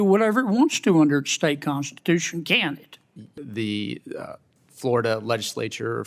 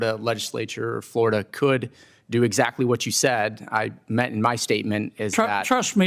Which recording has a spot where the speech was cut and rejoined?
first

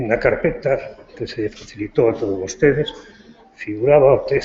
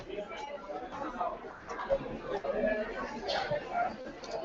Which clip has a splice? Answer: first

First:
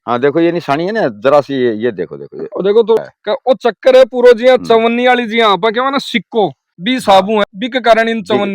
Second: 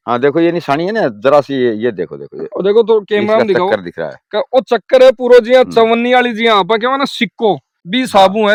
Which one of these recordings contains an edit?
first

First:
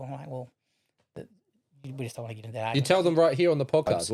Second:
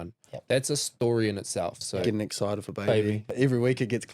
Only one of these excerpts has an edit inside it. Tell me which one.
second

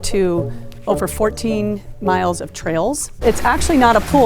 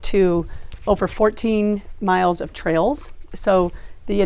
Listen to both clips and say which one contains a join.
first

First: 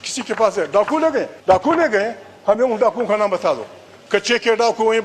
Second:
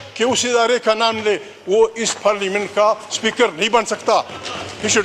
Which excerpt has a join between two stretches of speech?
first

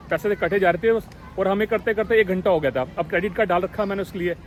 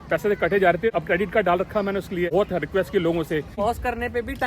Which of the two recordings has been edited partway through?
second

